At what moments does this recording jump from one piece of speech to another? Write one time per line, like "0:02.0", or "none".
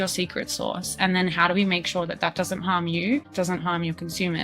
0:03.3